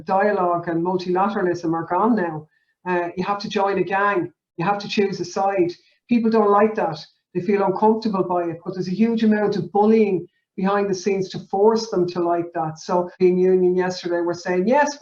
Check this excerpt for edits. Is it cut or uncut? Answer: cut